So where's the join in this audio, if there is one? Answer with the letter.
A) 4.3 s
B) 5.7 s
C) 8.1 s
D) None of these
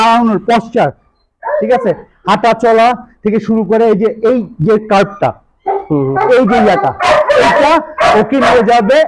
D